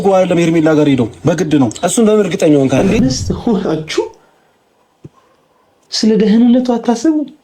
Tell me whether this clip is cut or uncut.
cut